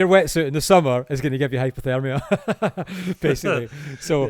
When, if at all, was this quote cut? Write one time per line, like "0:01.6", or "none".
none

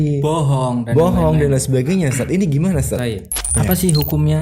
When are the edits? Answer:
0:03.4

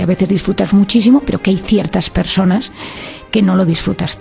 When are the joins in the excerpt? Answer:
none

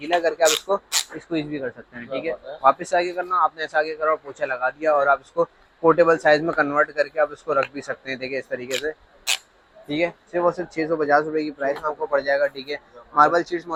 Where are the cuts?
none

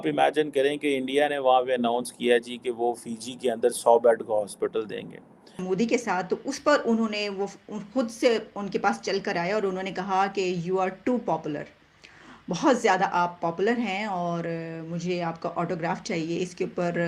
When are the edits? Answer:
0:05.6

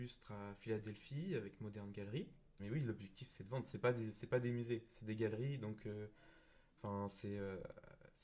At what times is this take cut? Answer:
0:02.5

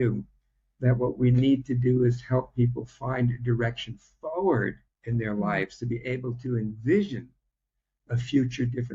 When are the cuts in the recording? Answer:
0:04.9

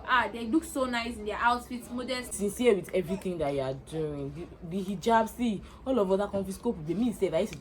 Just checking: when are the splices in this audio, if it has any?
0:02.3

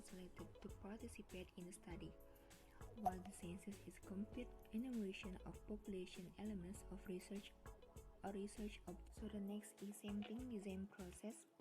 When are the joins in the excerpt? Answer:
0:09.1

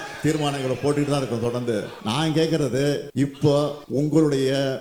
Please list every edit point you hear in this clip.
0:01.9
0:03.1
0:03.8

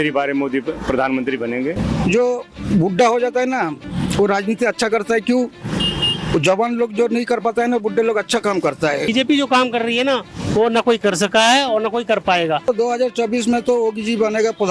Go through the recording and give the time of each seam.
0:01.8
0:09.1
0:12.7

